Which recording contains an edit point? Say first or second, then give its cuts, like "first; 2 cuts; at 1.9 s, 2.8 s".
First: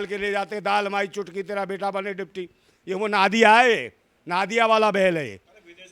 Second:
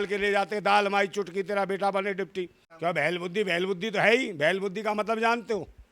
second; 1 cut; at 2.6 s